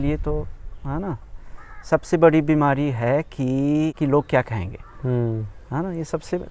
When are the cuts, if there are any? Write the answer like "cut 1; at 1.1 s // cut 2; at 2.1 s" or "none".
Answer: none

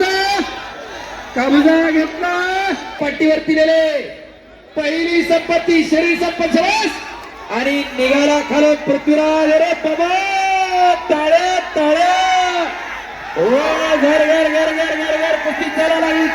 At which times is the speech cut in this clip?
cut 1; at 3.0 s

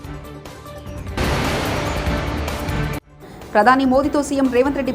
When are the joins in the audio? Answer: cut 1; at 1.2 s // cut 2; at 2.9 s

